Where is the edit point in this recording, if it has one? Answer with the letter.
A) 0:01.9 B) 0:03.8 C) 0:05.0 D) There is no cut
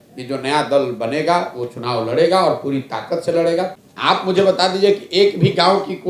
B